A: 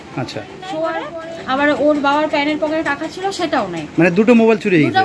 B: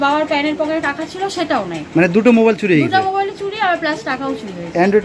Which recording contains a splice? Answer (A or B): A